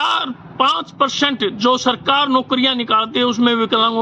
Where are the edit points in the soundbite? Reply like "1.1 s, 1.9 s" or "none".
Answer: none